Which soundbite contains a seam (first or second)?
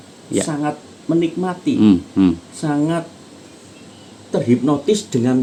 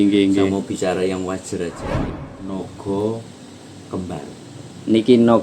second